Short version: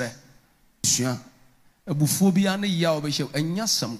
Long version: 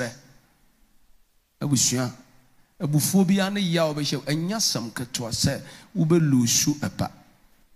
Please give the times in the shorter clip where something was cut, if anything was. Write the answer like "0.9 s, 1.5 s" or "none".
0.9 s